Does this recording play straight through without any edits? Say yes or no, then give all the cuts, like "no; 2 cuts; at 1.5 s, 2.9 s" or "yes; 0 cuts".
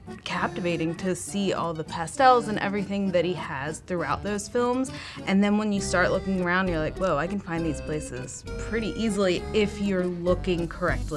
yes; 0 cuts